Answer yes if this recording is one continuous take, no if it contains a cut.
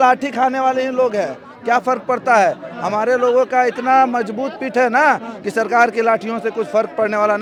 yes